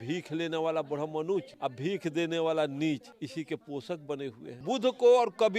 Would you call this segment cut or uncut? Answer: cut